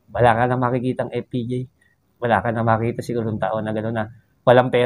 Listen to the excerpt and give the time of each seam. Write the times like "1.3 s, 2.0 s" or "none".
none

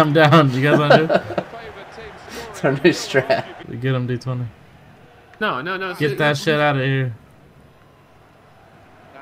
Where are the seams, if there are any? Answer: 3.6 s

